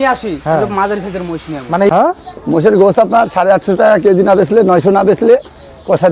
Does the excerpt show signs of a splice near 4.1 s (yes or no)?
no